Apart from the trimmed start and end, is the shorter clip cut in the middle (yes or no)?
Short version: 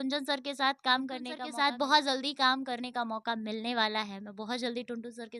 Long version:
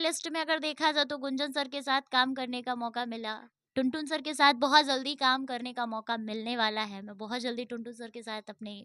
yes